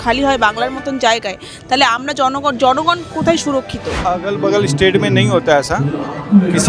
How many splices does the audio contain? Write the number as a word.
one